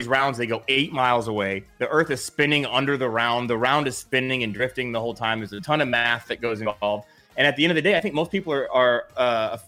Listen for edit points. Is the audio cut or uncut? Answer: uncut